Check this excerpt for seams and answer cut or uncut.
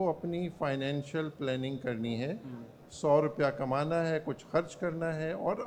uncut